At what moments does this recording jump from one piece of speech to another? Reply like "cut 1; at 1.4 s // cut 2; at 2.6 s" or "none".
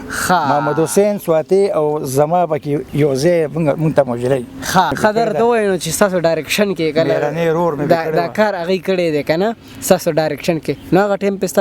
cut 1; at 4.9 s